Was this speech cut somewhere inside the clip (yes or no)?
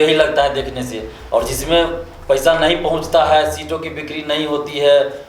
no